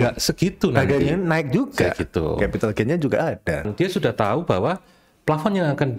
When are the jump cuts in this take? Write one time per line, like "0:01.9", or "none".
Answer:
0:03.6